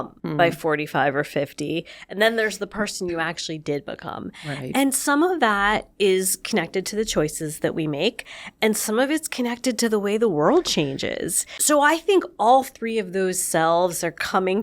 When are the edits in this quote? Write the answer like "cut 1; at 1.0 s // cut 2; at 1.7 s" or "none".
cut 1; at 11.5 s